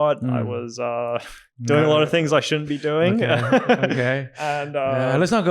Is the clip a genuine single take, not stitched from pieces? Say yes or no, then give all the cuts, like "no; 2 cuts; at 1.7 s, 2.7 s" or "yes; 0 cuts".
yes; 0 cuts